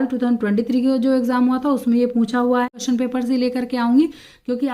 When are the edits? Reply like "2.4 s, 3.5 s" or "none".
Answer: 2.7 s